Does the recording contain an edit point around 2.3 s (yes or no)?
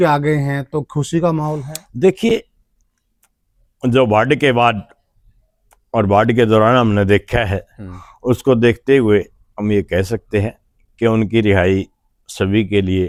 no